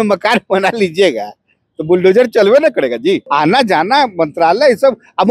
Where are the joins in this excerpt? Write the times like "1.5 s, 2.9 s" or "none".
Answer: 3.2 s

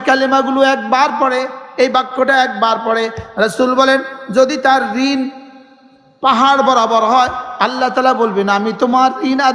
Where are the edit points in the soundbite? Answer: none

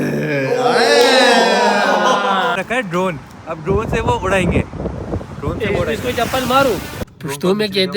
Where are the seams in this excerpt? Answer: 2.6 s, 7.0 s

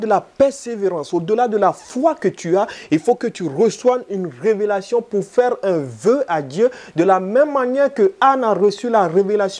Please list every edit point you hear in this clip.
none

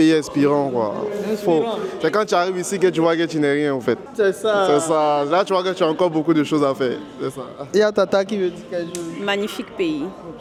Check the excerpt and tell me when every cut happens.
none

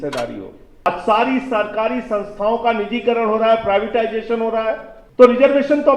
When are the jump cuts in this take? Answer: 0.9 s, 5.0 s

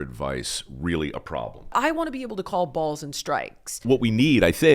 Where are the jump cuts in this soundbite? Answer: 1.7 s, 3.8 s

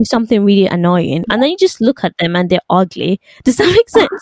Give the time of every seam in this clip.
1.3 s

